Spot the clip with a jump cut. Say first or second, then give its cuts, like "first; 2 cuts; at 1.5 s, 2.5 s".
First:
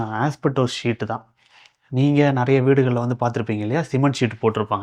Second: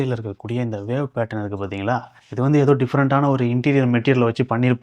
second; 1 cut; at 2.2 s